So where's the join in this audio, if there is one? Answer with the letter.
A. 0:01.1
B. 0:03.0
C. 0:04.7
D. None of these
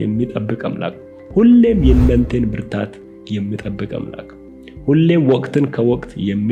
D